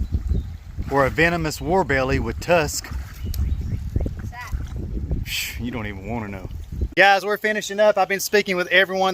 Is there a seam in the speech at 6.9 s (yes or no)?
yes